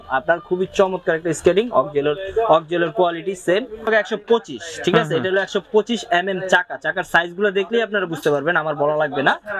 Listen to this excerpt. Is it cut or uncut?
cut